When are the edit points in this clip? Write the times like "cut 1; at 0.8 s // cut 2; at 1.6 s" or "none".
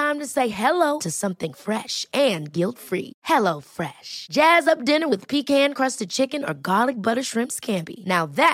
none